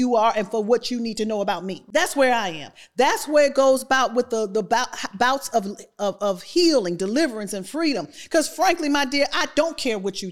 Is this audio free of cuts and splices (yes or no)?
no